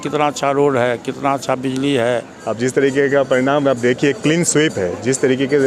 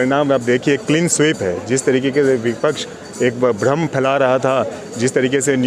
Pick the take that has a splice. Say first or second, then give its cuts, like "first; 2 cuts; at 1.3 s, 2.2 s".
first; 1 cut; at 2.4 s